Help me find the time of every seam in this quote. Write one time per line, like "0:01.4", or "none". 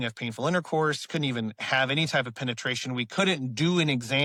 none